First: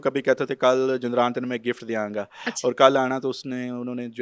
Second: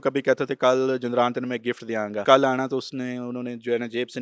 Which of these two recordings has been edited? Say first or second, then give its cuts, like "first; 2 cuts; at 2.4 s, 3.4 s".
second; 1 cut; at 2.2 s